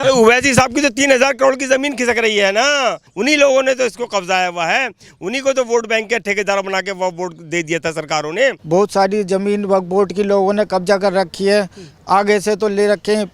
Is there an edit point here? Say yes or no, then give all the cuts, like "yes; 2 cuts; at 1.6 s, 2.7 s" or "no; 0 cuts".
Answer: yes; 2 cuts; at 3.1 s, 8.6 s